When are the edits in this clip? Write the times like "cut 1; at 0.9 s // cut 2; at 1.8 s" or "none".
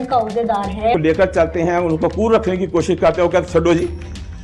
cut 1; at 0.9 s